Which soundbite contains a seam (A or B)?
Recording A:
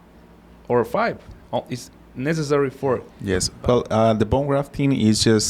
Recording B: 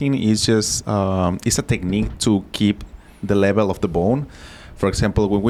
A